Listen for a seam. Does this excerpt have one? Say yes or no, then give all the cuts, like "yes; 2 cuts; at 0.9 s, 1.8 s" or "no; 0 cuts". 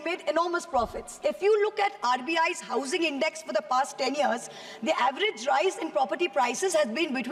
no; 0 cuts